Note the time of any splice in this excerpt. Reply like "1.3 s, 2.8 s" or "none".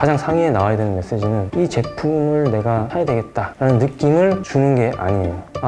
1.5 s, 3.1 s, 4.4 s

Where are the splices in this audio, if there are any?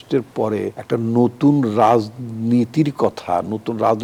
none

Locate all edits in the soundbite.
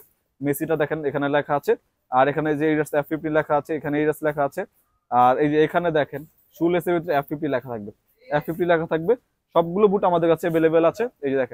none

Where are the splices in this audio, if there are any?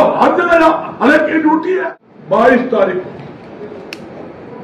1.7 s

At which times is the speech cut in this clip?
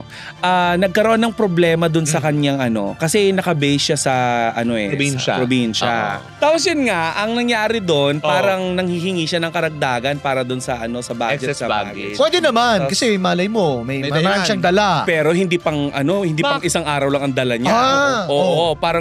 6.2 s

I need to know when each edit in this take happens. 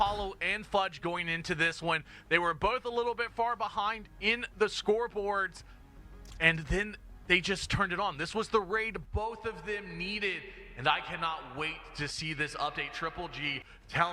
none

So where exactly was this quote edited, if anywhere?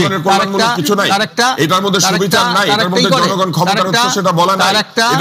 none

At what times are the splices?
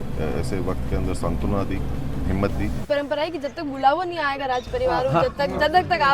2.9 s

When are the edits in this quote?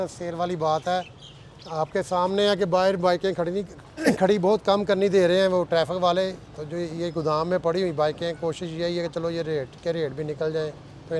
4.1 s

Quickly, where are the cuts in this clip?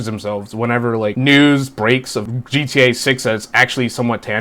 1.1 s, 2.3 s

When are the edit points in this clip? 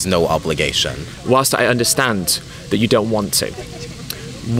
1.1 s

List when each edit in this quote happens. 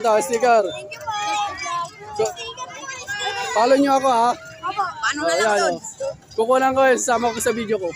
none

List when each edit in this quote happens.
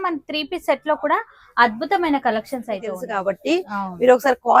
3.0 s

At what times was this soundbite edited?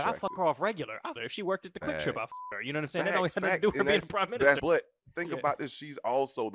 1.2 s, 4.6 s

